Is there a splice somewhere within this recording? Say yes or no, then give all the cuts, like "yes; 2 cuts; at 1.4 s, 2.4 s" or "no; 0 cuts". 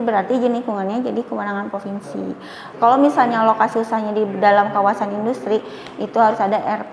yes; 1 cut; at 2.7 s